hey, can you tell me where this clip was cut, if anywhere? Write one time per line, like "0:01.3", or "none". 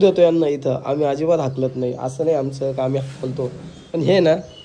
none